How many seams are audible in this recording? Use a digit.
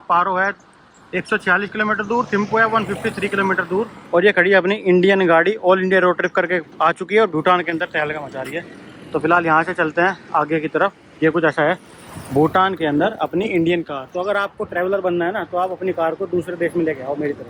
0